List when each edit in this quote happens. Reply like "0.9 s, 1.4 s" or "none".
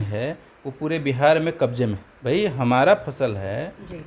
2.1 s